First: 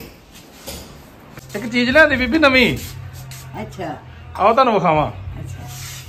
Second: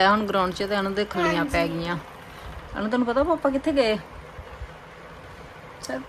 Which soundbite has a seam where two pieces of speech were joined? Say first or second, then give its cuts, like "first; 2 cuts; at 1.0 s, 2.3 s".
first; 1 cut; at 1.5 s